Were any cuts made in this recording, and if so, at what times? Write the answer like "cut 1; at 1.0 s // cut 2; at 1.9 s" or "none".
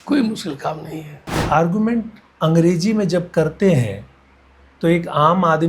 cut 1; at 1.4 s